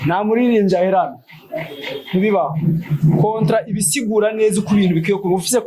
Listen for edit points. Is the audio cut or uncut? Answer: uncut